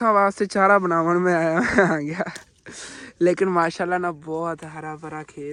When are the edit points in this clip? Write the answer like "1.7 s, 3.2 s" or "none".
none